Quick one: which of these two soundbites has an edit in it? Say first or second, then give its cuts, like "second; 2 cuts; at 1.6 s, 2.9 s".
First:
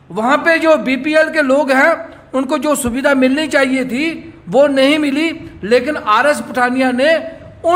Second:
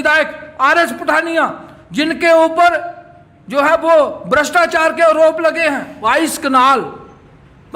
second; 1 cut; at 5.9 s